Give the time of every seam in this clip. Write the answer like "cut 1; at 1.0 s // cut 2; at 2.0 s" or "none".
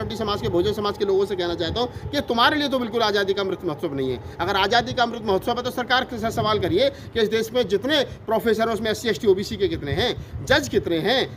none